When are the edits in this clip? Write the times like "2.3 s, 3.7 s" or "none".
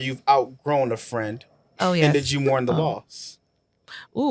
none